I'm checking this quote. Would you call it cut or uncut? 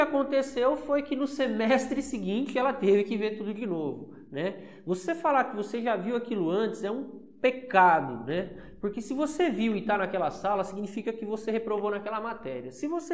uncut